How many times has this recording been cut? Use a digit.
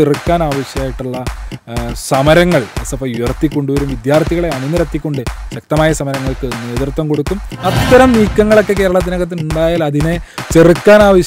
1